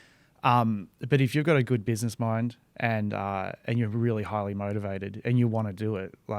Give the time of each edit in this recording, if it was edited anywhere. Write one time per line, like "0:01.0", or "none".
none